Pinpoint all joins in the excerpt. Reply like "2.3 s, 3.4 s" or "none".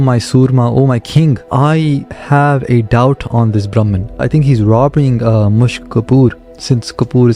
1.5 s, 4.2 s